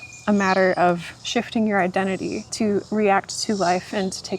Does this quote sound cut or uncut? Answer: cut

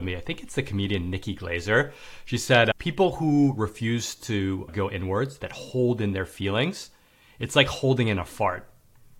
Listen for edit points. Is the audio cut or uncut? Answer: cut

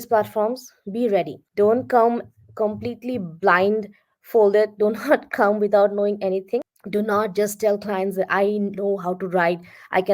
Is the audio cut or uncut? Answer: cut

